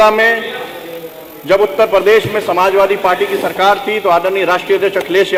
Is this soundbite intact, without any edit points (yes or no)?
yes